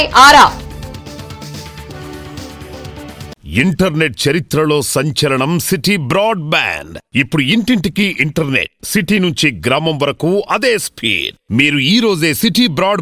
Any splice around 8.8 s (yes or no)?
no